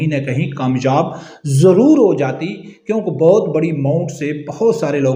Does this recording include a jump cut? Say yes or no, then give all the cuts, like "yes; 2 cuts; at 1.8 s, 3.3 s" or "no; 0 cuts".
no; 0 cuts